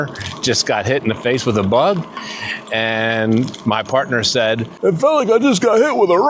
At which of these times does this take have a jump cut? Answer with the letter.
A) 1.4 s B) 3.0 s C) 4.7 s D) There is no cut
C